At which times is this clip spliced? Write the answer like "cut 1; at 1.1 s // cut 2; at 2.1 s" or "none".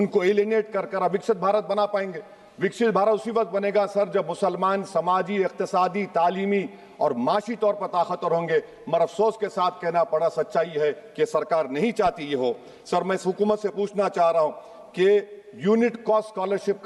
none